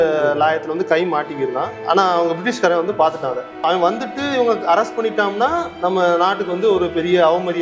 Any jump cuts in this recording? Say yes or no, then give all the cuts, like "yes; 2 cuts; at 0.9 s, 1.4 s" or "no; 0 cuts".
yes; 1 cut; at 3.6 s